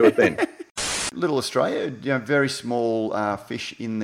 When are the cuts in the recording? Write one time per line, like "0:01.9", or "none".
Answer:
0:01.0

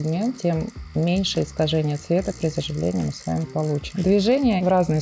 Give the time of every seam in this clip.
0:03.9

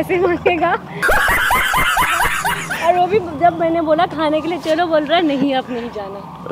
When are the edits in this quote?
none

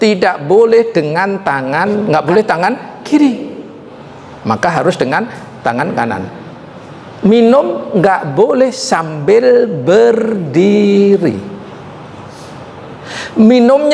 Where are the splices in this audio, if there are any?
0:02.0

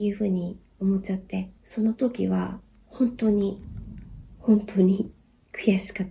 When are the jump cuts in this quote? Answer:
0:01.6

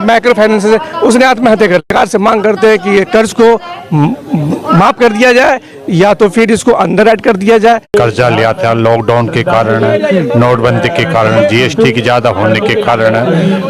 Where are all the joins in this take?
0:01.9
0:07.9

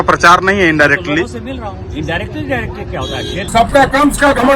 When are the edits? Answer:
0:03.4

